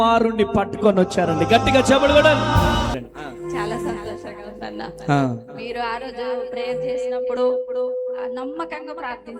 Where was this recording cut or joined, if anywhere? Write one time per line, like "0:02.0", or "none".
0:03.0